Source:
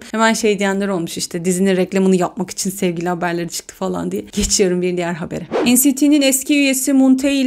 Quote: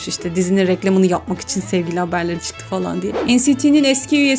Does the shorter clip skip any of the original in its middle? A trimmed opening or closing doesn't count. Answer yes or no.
yes